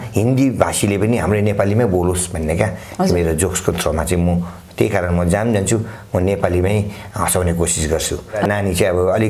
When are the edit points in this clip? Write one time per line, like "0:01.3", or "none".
0:08.4